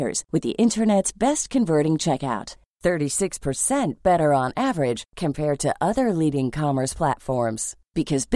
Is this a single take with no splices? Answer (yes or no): yes